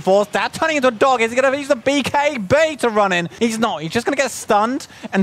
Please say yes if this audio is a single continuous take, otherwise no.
no